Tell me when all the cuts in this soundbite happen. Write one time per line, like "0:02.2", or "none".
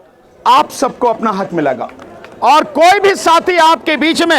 0:01.8